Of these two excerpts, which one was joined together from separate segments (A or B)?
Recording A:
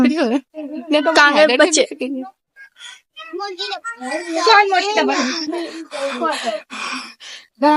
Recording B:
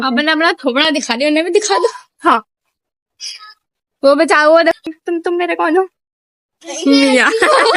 B